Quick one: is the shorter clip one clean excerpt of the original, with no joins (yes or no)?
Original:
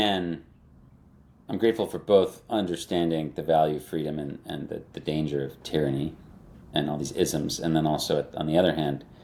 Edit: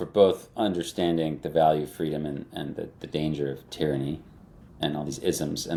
yes